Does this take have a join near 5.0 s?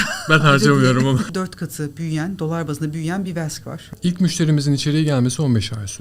no; 2 cuts; at 1.3 s, 3.8 s

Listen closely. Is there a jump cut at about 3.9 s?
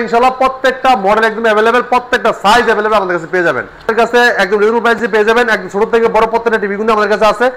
yes; 1 cut; at 3.9 s

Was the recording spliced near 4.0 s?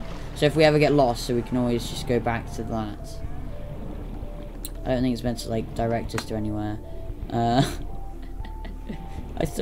yes; 1 cut; at 4.0 s

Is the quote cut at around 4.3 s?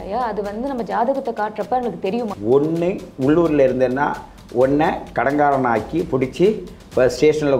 no; 1 cut; at 2.3 s

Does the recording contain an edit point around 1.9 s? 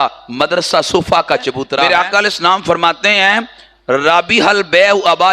yes; 1 cut; at 1.9 s

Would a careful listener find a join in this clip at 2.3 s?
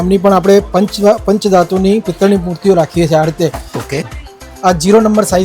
no; 1 cut; at 4.0 s

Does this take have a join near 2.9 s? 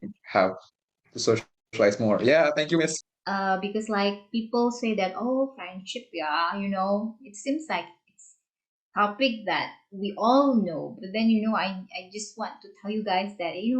yes; 1 cut; at 2.9 s

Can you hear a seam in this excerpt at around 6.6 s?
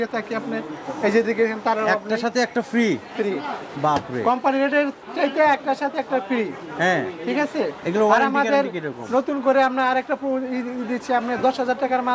no; 0 cuts

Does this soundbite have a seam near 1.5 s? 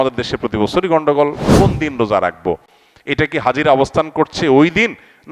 yes; 1 cut; at 1.5 s

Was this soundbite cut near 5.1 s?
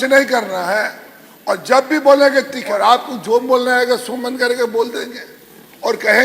no; 1 cut; at 2.7 s

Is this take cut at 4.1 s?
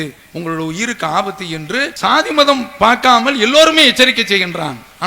no; 1 cut; at 1.9 s

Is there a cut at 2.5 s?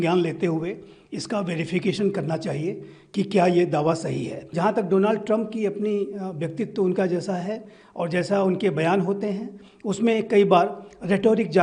no; 1 cut; at 4.5 s

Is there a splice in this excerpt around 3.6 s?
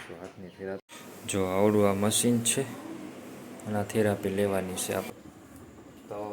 no; 2 cuts; at 0.8 s, 5.1 s

